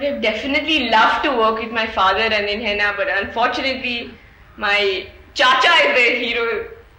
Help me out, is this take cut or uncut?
uncut